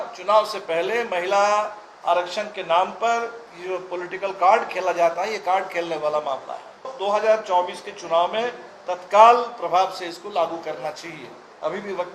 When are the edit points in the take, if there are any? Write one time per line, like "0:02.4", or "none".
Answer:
0:06.9

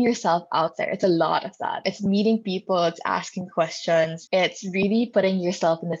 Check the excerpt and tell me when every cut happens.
0:01.9
0:04.2

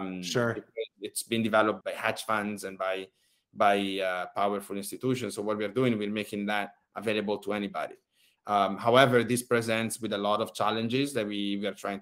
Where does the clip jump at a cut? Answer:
0:01.8

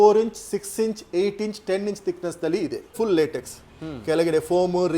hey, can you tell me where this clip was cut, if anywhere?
0:02.9

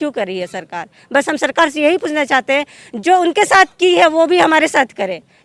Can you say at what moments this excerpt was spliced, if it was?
none

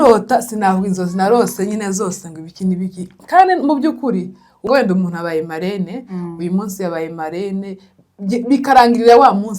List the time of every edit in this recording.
0:04.6

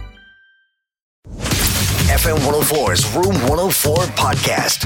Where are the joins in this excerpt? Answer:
0:01.5

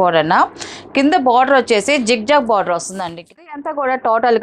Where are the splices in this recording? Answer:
0:03.5

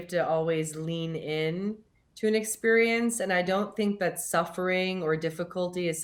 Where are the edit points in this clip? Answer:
none

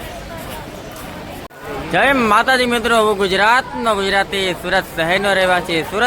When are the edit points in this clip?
0:01.5

